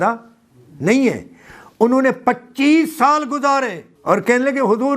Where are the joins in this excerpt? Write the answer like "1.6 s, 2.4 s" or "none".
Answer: 3.9 s